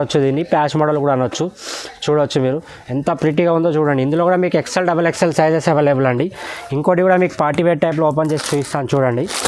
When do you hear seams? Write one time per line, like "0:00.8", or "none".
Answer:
none